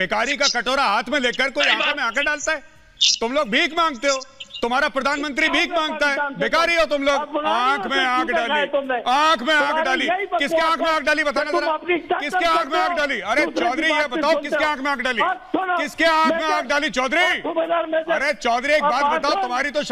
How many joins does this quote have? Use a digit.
0